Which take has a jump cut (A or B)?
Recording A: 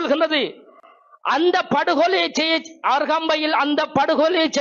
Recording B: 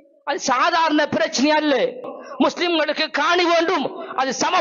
B